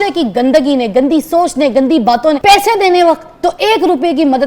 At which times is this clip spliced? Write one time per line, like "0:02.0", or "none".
0:02.4